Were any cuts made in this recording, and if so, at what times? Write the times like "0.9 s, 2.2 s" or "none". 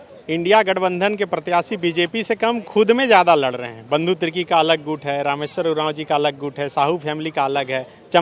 none